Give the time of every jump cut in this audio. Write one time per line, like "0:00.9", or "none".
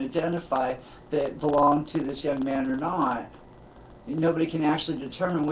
none